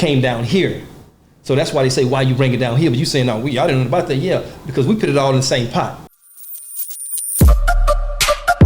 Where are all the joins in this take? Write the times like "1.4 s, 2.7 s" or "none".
6.1 s